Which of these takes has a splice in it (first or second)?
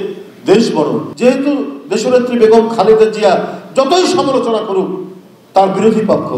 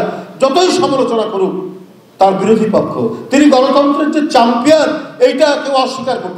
first